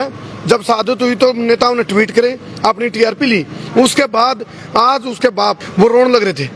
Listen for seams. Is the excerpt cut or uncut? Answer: cut